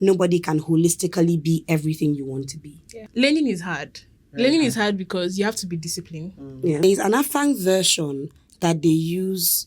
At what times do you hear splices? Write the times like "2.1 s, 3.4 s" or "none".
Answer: 3.0 s, 6.8 s